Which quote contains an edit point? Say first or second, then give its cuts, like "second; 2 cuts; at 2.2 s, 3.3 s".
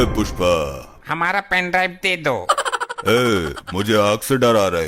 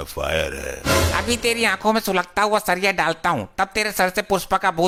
first; 1 cut; at 0.9 s